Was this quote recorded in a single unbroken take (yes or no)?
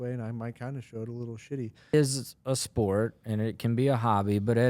no